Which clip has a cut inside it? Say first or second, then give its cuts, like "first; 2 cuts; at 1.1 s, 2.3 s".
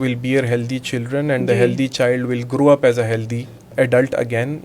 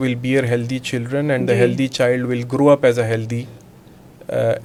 first; 1 cut; at 3.7 s